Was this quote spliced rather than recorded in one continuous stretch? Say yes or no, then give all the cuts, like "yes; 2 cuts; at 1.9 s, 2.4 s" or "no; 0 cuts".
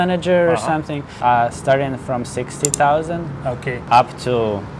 yes; 2 cuts; at 1.0 s, 3.8 s